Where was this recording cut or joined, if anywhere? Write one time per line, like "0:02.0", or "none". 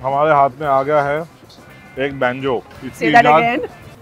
0:02.8